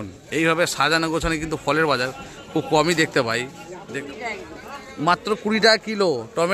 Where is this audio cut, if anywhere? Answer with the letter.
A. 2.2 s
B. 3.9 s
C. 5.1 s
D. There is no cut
B